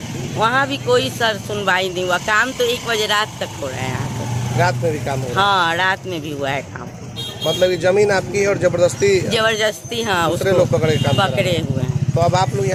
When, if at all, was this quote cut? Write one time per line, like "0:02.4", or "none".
none